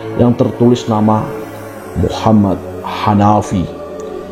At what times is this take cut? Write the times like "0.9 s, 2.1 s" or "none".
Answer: none